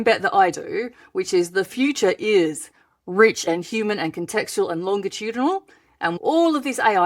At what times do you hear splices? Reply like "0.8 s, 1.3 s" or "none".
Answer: 3.4 s, 6.2 s